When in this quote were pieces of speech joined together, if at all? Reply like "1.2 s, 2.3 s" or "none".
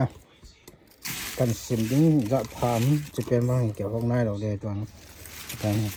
none